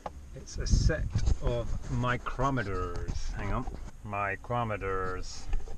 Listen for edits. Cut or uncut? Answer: cut